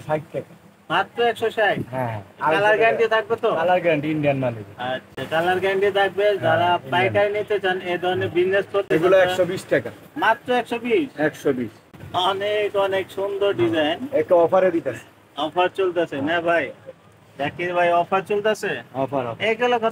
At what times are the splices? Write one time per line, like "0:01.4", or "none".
none